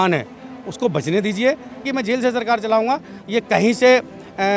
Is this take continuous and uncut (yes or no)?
no